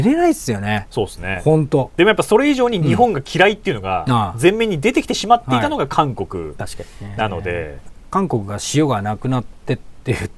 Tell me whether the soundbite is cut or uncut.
cut